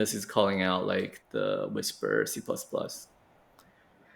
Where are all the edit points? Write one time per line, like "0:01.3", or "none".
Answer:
0:01.2